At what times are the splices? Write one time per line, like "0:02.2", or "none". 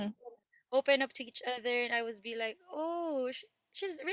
none